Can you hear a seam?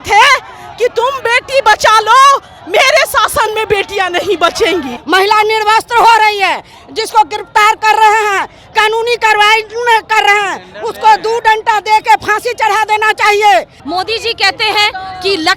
yes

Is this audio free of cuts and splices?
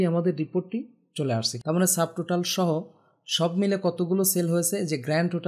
no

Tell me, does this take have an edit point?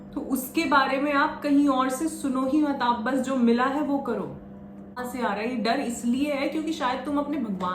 yes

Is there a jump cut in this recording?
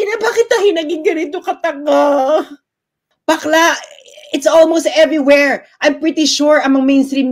yes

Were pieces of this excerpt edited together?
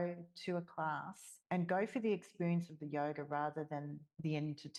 no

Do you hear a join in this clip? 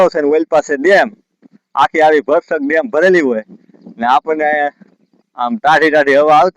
no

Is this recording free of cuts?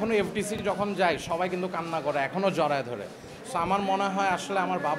yes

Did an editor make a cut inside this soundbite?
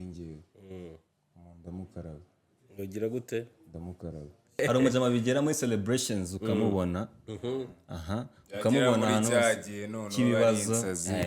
yes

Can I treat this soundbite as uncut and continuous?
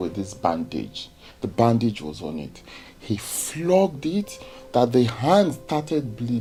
yes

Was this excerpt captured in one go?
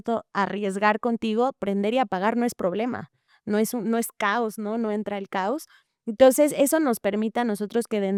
yes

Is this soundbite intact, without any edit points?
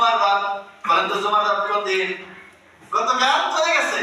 no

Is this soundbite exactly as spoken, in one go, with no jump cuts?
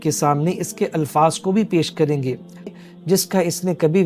no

